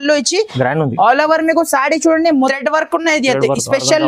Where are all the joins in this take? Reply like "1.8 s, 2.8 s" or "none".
2.5 s